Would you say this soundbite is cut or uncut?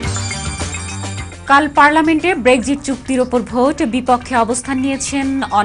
cut